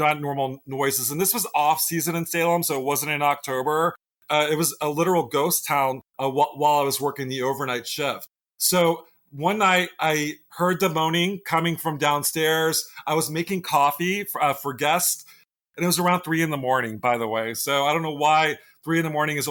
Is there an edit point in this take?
no; 0 cuts

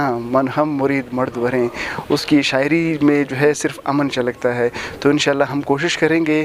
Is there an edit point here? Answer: no; 0 cuts

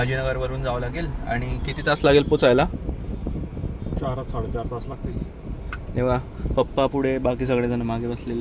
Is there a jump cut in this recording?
no; 0 cuts

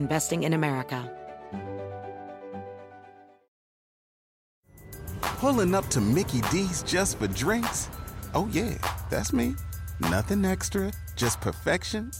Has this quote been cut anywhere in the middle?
yes; 1 cut; at 1.1 s

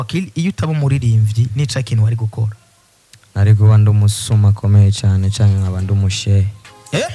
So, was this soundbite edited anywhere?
no; 0 cuts

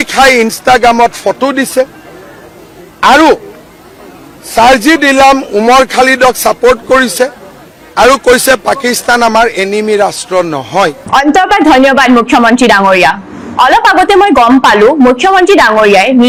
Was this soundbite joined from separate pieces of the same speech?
no; 0 cuts

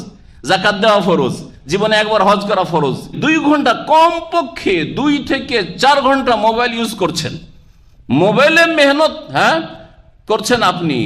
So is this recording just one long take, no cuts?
no; 1 cut; at 3.2 s

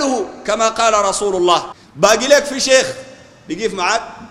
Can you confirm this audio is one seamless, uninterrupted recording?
no; 1 cut; at 1.8 s

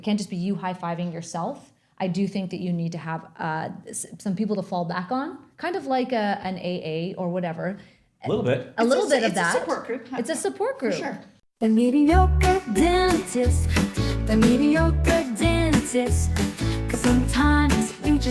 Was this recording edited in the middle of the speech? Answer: yes; 1 cut; at 11.3 s

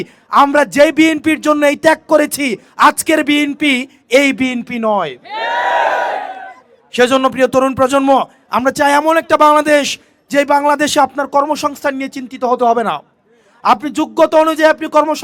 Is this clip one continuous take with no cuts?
yes; 0 cuts

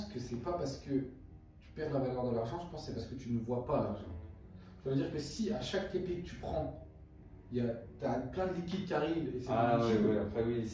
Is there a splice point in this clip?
no; 0 cuts

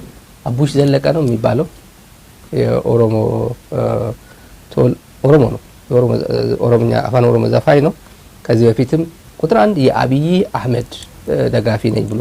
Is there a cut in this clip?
no; 0 cuts

